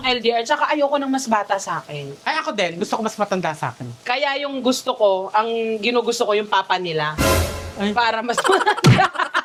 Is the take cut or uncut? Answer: uncut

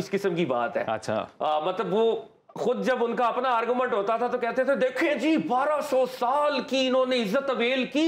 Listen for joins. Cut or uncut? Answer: uncut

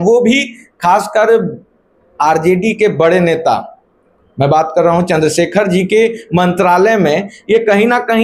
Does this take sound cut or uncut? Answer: uncut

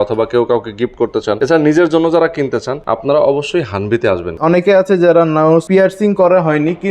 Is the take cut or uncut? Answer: cut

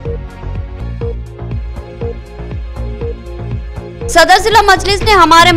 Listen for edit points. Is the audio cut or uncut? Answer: cut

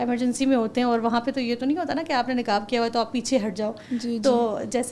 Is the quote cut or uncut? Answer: uncut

